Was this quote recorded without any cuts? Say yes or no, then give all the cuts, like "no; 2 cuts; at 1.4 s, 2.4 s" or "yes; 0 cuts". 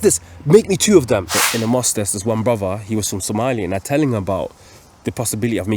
no; 1 cut; at 1.4 s